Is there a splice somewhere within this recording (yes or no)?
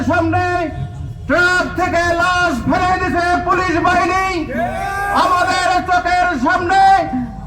no